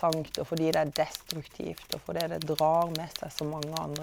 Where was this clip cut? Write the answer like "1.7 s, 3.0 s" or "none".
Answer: none

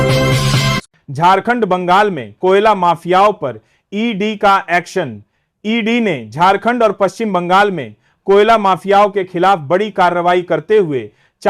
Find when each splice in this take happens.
1.0 s

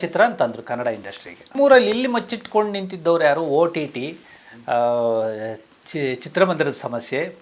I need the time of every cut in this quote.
1.5 s

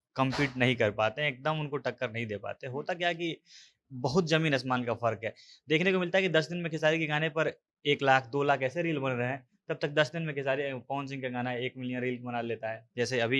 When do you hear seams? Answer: none

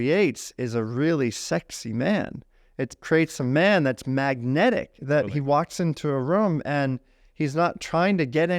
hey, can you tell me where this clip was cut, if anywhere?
none

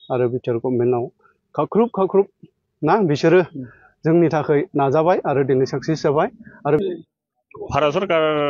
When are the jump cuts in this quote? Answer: 6.8 s

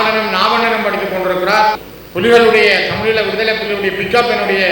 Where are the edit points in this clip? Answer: 1.9 s

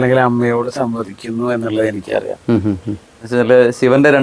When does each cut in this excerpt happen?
3.3 s

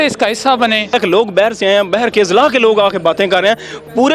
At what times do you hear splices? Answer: 0.9 s

